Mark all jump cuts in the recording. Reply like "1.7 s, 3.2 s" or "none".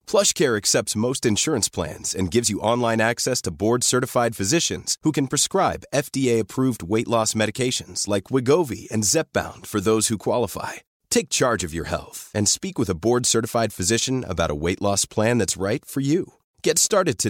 none